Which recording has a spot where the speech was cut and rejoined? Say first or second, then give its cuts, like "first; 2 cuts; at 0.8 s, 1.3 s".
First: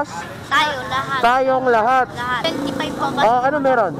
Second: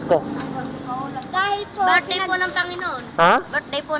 first; 1 cut; at 2.4 s